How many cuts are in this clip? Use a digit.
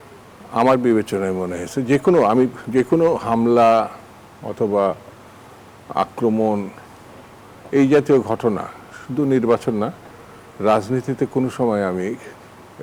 0